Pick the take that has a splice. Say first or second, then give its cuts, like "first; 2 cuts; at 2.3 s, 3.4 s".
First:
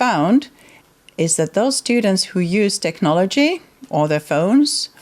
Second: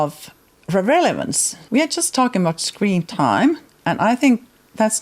second; 2 cuts; at 1.6 s, 3.7 s